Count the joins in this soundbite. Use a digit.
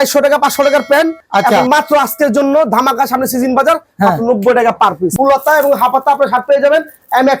1